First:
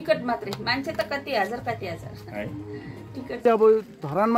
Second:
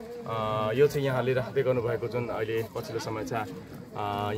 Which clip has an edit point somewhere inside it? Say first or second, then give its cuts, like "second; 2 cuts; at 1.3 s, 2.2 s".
first; 1 cut; at 3.4 s